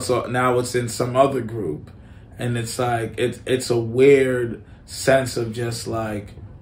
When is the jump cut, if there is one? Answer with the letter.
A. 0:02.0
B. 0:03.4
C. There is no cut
C